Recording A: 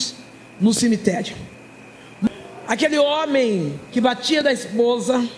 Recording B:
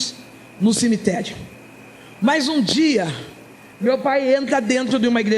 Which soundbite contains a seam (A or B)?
A